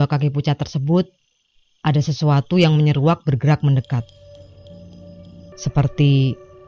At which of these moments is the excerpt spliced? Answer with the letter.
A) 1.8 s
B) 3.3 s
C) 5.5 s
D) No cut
C